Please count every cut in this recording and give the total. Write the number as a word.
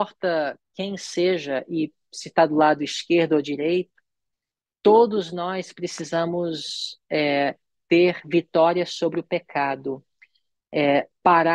zero